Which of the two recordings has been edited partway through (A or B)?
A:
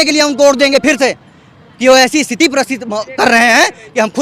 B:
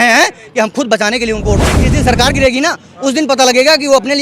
B